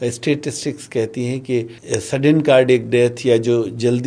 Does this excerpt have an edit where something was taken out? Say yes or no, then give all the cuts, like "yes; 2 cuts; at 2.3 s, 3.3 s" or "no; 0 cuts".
yes; 1 cut; at 1.8 s